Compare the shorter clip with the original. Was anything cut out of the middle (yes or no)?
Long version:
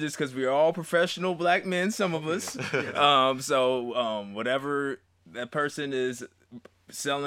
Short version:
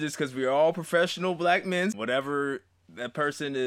yes